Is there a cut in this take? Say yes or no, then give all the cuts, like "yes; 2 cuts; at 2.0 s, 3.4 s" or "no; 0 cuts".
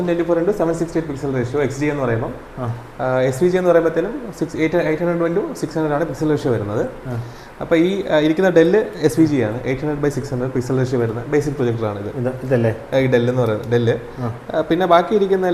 no; 0 cuts